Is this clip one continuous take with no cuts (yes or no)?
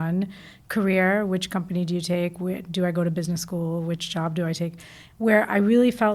yes